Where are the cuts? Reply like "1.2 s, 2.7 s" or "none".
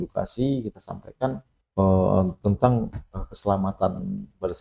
1.5 s